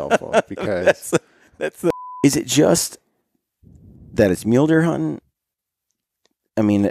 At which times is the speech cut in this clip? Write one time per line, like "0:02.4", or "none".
0:01.9